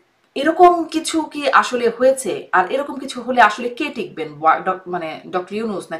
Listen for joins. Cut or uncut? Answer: uncut